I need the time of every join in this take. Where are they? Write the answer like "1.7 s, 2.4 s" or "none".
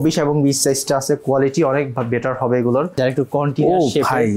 2.9 s